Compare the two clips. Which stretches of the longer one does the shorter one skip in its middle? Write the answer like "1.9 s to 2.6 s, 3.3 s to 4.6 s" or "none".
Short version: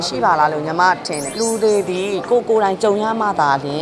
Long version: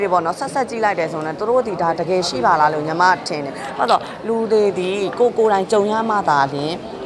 3.5 s to 4.1 s